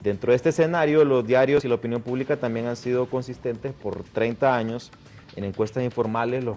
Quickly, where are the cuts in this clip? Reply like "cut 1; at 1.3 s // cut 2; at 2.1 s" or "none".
none